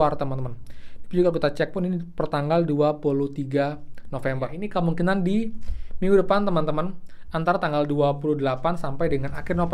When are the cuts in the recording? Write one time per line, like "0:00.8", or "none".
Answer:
0:04.6